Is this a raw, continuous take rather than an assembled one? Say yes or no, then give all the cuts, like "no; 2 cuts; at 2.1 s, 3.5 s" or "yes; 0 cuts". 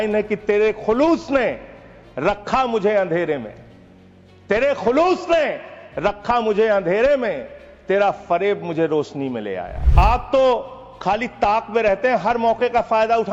yes; 0 cuts